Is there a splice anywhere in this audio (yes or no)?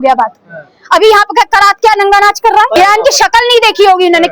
yes